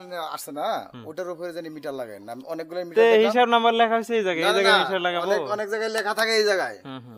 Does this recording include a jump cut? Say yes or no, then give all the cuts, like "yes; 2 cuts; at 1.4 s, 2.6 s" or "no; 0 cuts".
no; 0 cuts